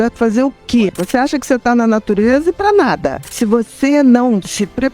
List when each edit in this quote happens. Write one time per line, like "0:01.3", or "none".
0:01.0
0:03.2